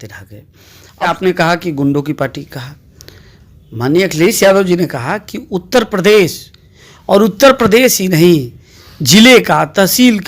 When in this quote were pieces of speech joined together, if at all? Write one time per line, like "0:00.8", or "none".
0:01.1